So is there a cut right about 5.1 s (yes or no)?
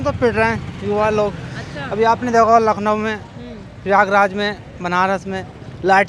no